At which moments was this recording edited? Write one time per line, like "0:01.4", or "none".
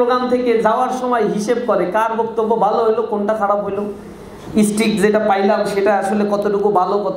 none